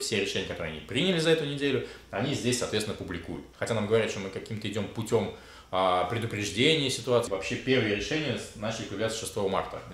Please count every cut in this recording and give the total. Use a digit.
2